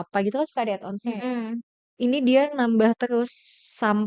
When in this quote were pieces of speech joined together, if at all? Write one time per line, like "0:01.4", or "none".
0:01.8